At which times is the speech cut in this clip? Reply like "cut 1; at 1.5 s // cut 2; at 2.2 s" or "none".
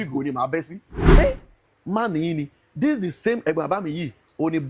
cut 1; at 1.2 s